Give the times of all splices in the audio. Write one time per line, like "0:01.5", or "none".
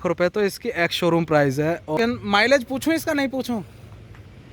0:01.9

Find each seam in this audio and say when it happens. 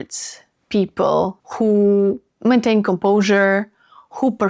0:01.4

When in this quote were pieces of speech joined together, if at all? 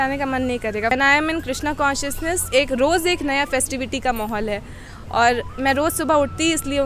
0:00.9

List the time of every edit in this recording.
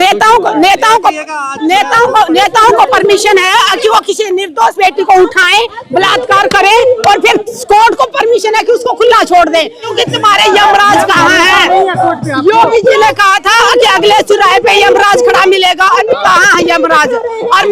0:09.9

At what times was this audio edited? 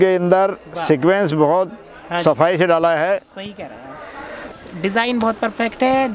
0:04.4

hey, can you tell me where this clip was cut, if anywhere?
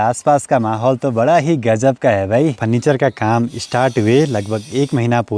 0:02.6

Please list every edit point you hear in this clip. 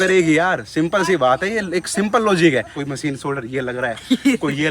0:02.8

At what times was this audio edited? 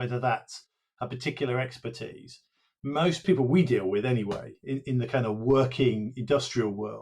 0:03.2

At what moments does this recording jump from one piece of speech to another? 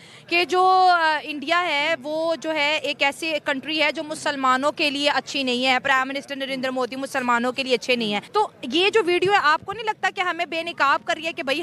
0:08.2

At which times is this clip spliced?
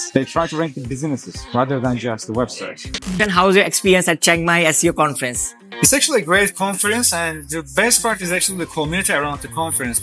0:03.2

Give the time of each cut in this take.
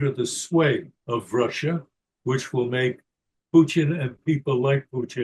0:00.9

